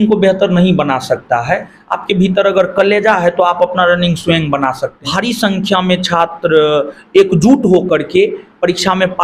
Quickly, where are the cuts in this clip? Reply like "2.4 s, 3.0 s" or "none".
4.9 s